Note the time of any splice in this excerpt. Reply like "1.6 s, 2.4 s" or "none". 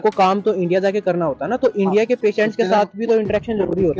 none